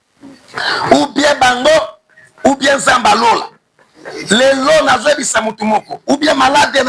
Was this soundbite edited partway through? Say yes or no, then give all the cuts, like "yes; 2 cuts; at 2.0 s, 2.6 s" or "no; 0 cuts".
no; 0 cuts